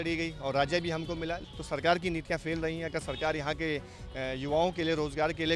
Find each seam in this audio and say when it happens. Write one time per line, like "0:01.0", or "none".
0:01.5